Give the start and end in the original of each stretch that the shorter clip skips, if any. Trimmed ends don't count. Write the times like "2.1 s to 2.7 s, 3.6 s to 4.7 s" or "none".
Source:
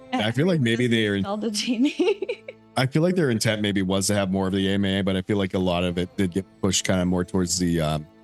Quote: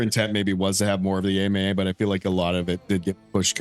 none